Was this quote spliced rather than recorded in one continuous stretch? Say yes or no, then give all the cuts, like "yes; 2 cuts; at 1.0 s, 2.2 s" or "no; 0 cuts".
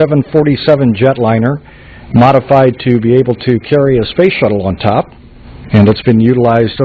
yes; 1 cut; at 3.7 s